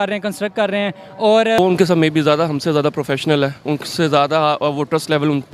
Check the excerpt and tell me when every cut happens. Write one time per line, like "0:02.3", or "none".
0:01.6